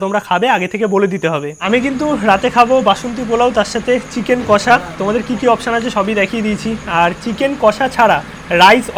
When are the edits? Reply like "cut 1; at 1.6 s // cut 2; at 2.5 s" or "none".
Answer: none